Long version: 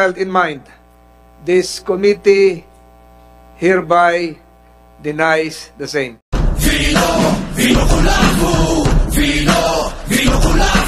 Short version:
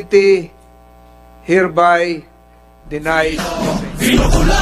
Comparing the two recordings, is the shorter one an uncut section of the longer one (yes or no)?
no